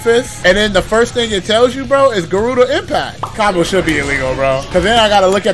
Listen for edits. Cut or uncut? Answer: cut